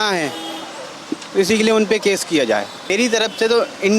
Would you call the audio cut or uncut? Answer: cut